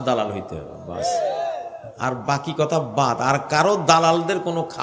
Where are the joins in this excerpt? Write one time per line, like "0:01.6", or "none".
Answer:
none

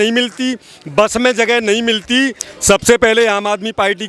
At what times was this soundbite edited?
0:02.4

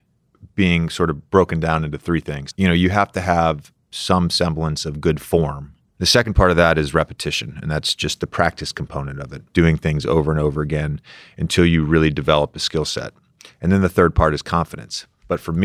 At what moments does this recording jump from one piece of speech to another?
0:02.1

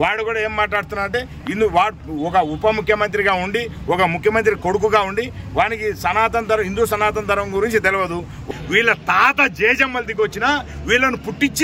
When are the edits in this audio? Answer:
0:08.4

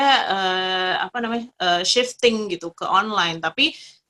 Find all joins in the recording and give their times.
none

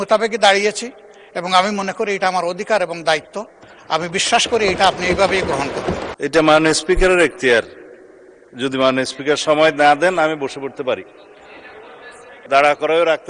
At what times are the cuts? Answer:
0:06.1
0:12.3

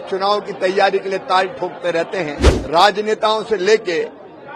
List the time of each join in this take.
0:02.5

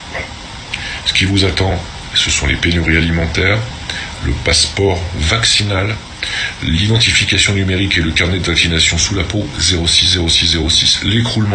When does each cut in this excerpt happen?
0:01.0

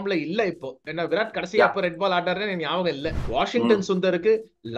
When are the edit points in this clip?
0:03.1

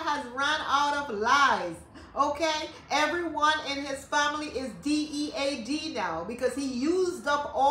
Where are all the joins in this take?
none

